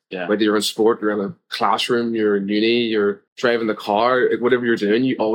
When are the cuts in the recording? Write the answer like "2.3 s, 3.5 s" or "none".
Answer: 3.3 s

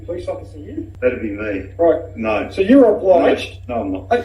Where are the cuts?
0.9 s

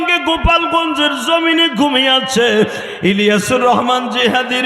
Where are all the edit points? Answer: 2.8 s

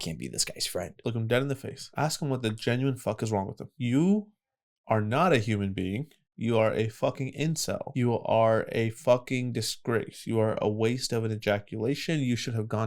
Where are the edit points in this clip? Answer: 0.9 s, 1.8 s, 3.7 s, 7.9 s

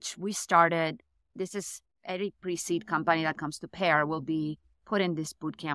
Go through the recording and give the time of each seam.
none

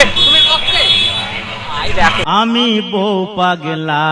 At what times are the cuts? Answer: 2.2 s

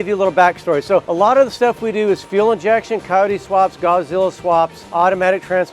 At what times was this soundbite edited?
1.1 s, 4.8 s

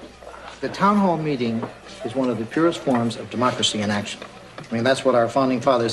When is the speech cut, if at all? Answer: none

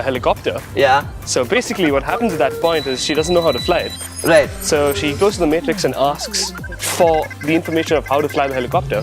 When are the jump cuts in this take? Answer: none

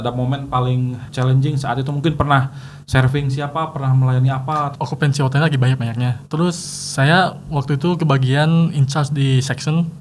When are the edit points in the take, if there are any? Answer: 1.1 s, 4.7 s, 6.2 s

